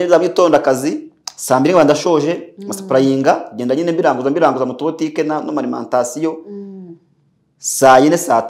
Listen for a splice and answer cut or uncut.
uncut